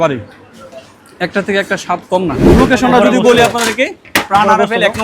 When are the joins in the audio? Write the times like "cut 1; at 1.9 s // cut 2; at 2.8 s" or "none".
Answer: cut 1; at 2.4 s

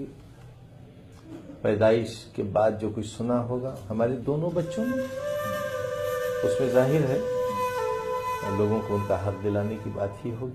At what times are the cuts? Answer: none

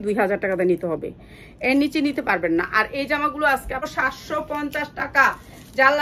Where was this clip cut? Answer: cut 1; at 3.9 s

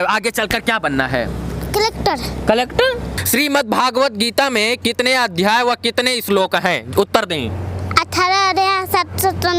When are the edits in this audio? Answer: cut 1; at 3.1 s

